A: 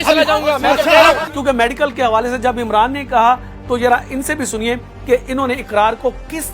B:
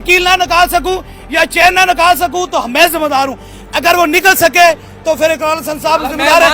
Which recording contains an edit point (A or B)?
A